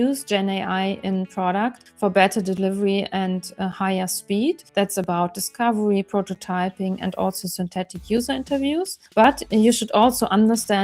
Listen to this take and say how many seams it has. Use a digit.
3